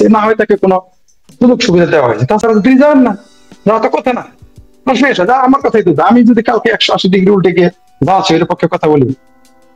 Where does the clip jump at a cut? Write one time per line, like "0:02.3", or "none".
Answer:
none